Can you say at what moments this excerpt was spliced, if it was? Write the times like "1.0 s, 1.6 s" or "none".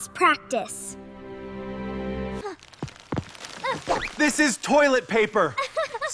2.4 s